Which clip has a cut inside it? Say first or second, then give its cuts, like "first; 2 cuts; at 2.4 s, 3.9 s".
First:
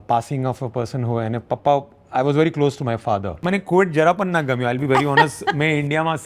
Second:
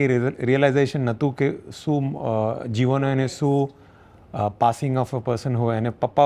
first; 1 cut; at 3.4 s